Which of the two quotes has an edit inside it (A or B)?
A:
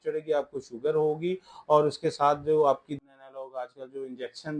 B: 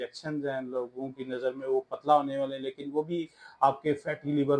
A